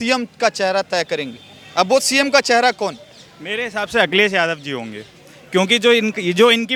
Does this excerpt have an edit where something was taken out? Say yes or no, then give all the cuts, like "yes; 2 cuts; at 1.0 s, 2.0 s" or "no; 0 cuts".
no; 0 cuts